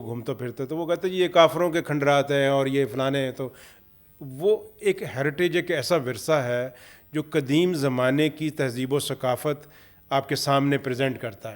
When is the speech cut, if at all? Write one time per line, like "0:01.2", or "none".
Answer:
none